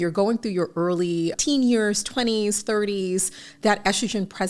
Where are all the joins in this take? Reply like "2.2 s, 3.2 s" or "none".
1.4 s

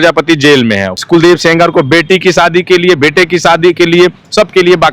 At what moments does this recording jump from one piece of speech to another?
0.9 s

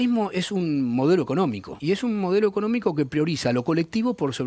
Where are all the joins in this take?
1.7 s

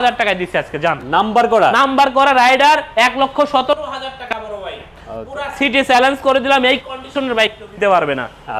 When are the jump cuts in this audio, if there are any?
none

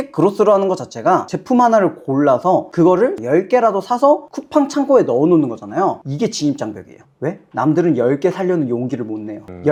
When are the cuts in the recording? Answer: none

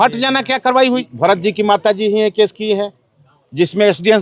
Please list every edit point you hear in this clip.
1.0 s

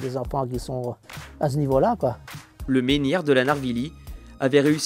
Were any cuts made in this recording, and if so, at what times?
2.5 s

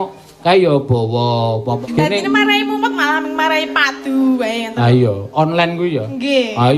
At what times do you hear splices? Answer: 1.8 s

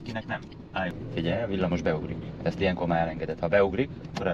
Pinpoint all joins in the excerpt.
0.9 s

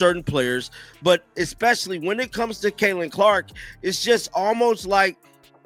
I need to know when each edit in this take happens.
none

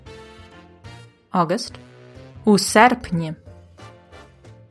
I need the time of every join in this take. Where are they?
3.4 s

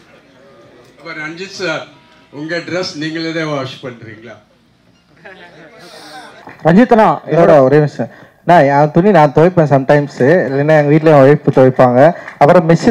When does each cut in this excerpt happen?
6.4 s

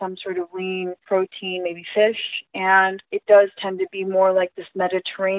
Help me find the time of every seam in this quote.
1.0 s, 3.1 s

